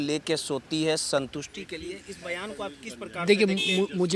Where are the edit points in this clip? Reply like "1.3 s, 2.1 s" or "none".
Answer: none